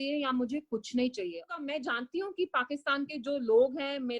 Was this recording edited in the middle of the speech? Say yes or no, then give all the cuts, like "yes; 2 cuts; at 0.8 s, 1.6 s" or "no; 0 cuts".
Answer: yes; 1 cut; at 1.5 s